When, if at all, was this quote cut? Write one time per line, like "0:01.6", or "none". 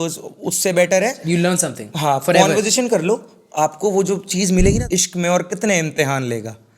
0:04.8